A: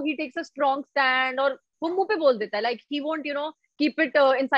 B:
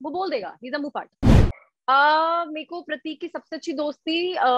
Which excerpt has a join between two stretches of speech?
B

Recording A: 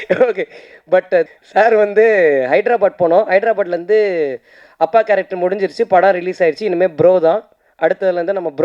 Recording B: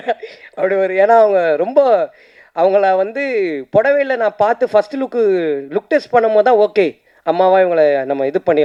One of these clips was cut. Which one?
A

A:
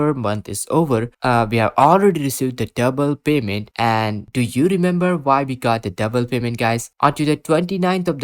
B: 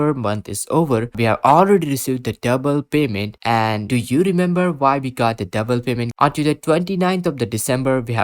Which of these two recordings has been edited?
B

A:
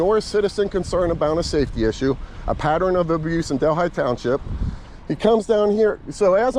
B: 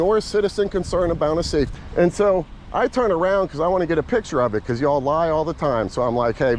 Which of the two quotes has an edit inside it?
B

